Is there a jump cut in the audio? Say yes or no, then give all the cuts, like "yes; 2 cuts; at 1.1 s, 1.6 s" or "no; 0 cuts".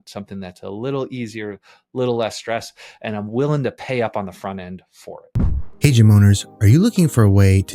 no; 0 cuts